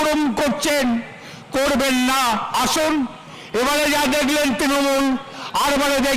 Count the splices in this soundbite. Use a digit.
1